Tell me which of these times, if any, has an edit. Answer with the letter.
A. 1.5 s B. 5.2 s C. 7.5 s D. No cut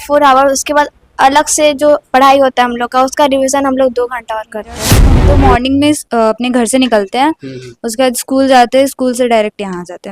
B